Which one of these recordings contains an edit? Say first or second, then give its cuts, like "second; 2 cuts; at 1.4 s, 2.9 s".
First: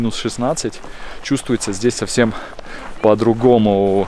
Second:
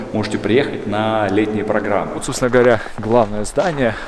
second; 1 cut; at 2.3 s